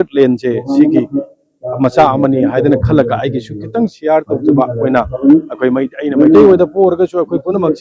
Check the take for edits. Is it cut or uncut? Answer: uncut